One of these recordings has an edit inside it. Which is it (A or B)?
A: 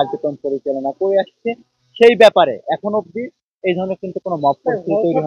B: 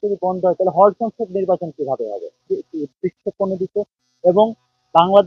B